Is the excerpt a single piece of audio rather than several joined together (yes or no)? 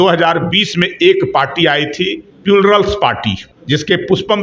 no